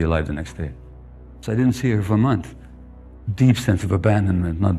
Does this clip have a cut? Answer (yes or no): yes